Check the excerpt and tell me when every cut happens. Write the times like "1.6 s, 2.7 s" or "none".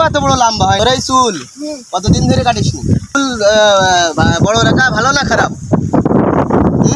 0.8 s, 3.2 s